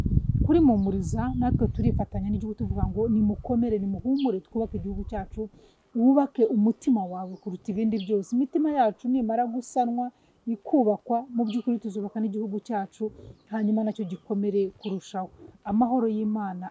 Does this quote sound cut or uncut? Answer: uncut